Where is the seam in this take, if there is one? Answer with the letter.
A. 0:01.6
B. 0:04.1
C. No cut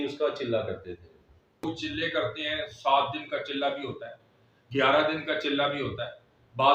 A